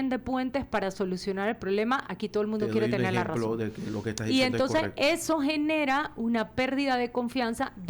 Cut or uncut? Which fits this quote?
uncut